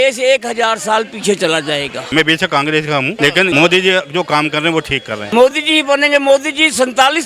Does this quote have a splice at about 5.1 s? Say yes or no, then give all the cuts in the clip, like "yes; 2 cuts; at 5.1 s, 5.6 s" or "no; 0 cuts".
yes; 3 cuts; at 2.1 s, 3.3 s, 5.1 s